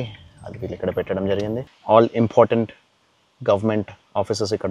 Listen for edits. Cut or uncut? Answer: uncut